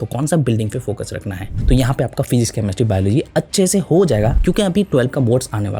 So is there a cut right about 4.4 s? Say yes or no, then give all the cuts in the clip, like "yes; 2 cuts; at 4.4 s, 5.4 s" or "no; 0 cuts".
yes; 2 cuts; at 1.4 s, 4.4 s